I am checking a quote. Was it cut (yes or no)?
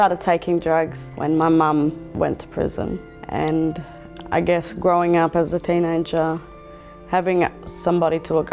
yes